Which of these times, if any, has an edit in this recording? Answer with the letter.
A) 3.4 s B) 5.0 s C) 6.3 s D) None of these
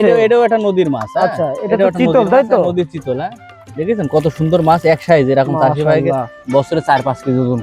C